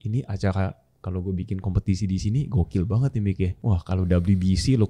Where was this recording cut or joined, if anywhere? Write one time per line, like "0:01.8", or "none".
0:03.6